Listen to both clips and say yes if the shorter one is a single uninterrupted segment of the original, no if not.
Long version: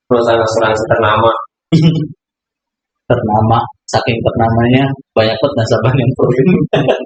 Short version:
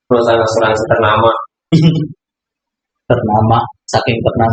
yes